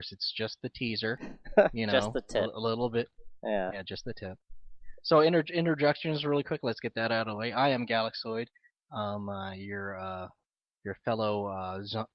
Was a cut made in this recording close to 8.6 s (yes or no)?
yes